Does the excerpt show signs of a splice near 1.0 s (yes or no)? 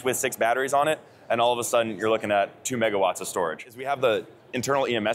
no